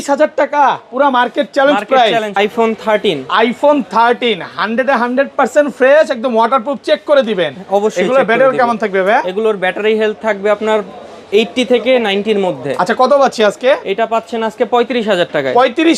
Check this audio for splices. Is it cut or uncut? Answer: cut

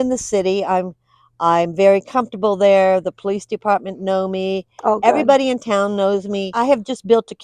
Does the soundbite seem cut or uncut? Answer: cut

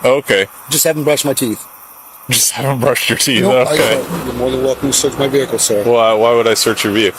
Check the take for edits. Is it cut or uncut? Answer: cut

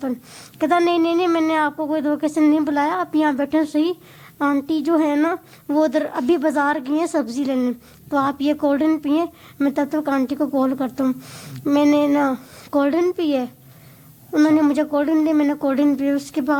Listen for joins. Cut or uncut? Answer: uncut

